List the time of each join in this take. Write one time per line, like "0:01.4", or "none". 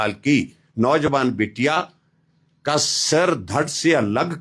none

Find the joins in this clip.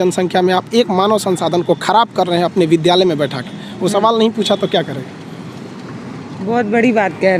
none

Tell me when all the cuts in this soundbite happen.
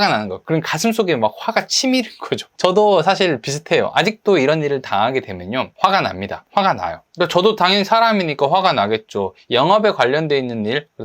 0:02.5
0:06.0
0:07.0

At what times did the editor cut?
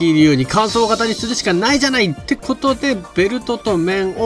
none

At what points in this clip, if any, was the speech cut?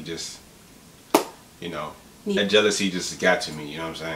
0:02.4

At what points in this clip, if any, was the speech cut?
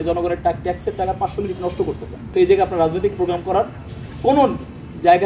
0:02.1

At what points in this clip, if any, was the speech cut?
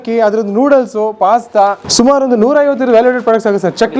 0:01.8

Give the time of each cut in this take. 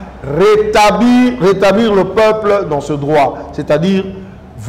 none

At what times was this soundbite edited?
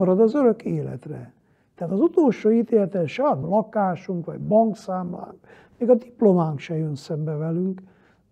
0:03.4

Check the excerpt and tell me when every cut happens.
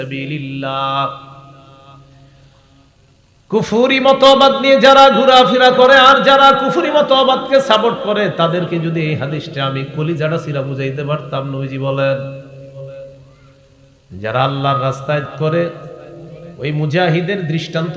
0:15.3

